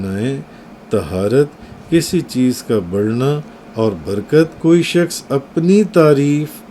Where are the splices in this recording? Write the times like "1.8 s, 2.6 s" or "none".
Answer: 4.6 s

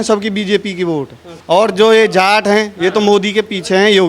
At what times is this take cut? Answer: 1.3 s

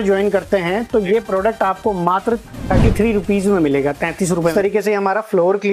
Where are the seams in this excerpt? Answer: 4.5 s

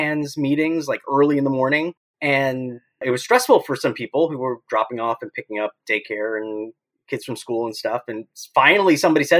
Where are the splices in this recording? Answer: 2.1 s, 3.0 s

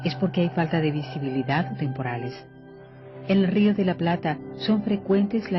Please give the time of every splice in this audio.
4.5 s

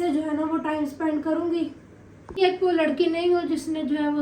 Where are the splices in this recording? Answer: 2.4 s

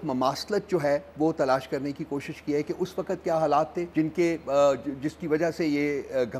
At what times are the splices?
3.8 s

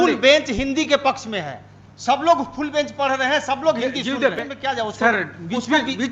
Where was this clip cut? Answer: 4.5 s

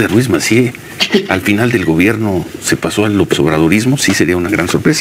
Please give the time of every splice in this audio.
none

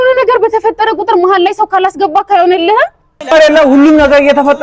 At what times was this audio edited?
3.1 s

